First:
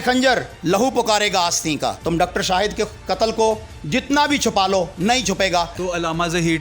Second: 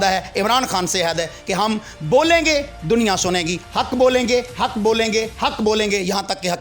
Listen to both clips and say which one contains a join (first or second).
first